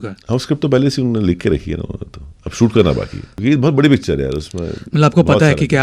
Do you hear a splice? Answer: yes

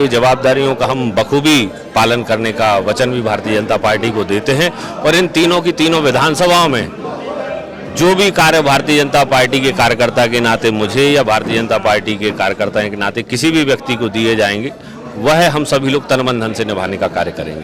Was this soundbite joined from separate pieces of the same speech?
no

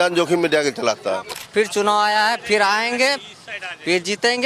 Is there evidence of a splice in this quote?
yes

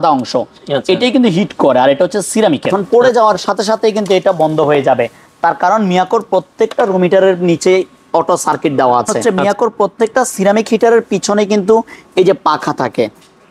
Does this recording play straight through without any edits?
no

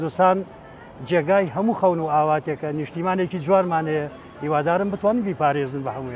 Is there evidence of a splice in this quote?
no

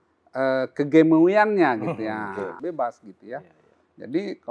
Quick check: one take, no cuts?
no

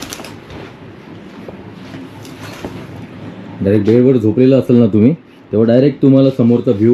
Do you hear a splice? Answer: no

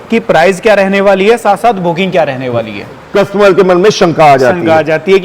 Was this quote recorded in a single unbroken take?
no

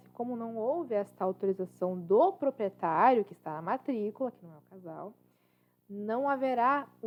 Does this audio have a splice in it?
no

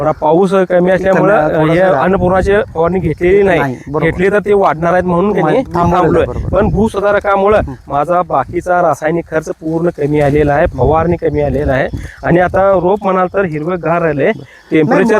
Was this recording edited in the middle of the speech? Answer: no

